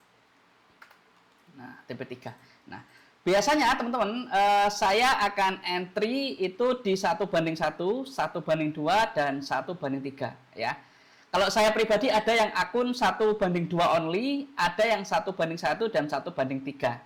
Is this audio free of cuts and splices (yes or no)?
yes